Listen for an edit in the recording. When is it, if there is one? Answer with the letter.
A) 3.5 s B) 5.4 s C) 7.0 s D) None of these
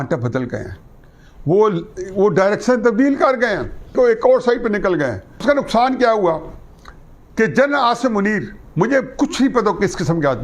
B